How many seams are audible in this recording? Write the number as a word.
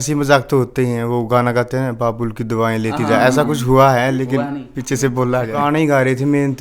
one